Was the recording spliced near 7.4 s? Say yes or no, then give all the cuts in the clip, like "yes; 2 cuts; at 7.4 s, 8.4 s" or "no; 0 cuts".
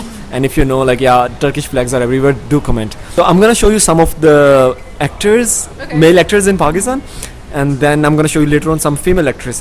no; 1 cut; at 3.0 s